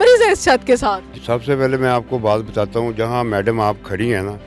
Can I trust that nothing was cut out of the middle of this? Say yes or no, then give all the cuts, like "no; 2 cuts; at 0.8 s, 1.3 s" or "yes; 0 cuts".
no; 1 cut; at 1.1 s